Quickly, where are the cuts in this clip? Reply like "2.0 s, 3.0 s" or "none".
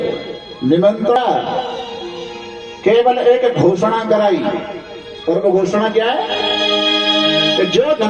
1.2 s